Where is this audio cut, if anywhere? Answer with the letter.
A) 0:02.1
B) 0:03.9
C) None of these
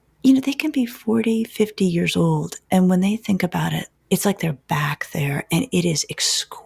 B